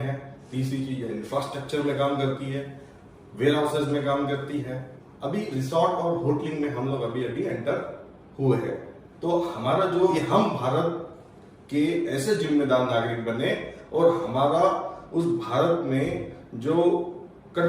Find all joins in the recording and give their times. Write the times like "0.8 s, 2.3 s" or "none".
10.1 s